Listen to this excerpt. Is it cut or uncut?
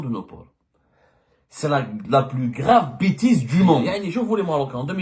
cut